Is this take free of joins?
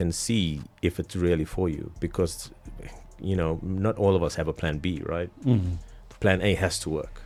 yes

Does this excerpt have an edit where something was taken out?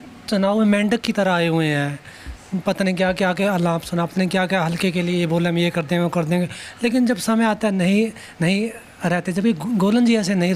no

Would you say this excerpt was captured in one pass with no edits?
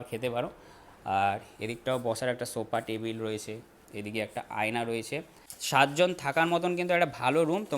no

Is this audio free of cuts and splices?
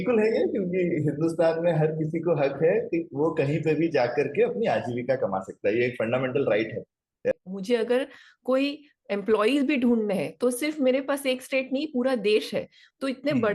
no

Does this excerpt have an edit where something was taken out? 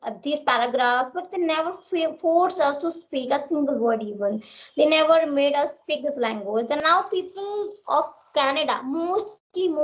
yes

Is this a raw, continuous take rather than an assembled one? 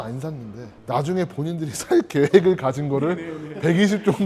yes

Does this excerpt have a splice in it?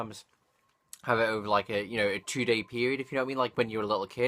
yes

